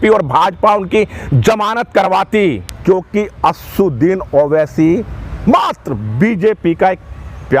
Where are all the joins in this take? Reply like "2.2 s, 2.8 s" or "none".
2.7 s